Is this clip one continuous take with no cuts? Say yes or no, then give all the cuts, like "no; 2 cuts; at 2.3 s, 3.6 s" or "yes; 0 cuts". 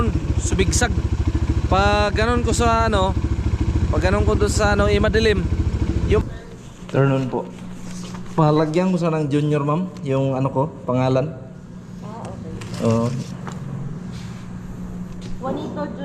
no; 1 cut; at 6.2 s